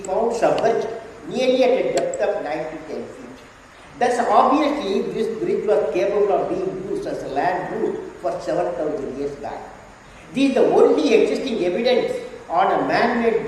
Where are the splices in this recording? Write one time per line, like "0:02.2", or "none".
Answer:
none